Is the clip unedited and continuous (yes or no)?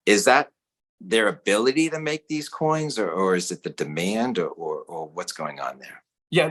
yes